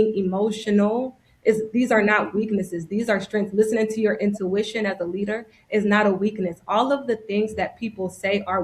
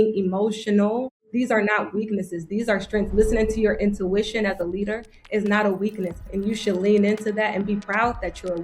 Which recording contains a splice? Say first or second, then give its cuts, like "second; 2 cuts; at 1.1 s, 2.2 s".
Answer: second; 2 cuts; at 1.2 s, 6.2 s